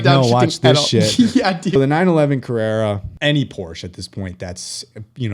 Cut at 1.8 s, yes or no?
yes